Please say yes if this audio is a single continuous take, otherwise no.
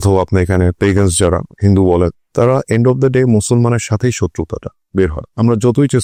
yes